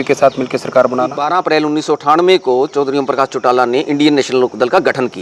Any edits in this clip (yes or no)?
yes